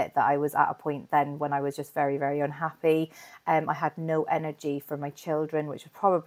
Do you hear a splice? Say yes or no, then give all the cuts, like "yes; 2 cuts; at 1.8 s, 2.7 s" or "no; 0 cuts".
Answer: no; 0 cuts